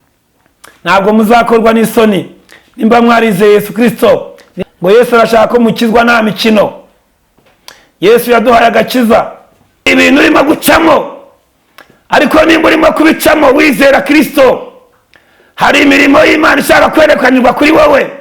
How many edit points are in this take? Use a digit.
2